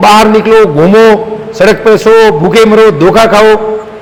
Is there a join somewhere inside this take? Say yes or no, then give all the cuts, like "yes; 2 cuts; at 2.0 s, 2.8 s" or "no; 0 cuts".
no; 0 cuts